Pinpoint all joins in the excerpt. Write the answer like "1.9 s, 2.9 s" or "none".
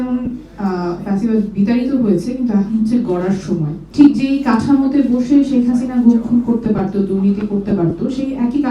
3.9 s